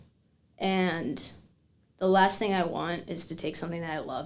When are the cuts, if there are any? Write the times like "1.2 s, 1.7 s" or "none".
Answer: none